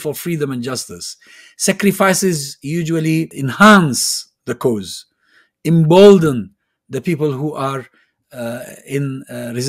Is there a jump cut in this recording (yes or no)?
yes